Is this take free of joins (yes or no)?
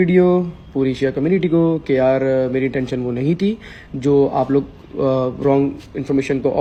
yes